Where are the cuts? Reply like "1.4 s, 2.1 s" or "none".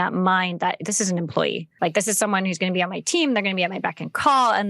1.7 s